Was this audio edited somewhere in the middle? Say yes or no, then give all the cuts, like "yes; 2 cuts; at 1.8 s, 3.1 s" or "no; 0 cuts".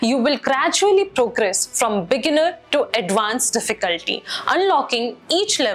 no; 0 cuts